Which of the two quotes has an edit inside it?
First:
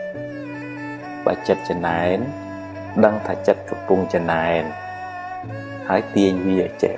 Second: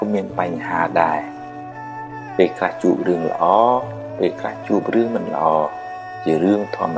first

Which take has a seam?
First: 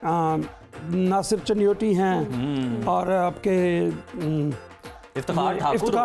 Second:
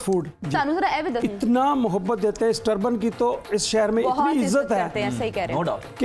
second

